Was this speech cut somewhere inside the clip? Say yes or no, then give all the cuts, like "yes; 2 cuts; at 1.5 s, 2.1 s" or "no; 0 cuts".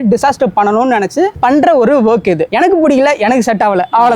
yes; 1 cut; at 2.5 s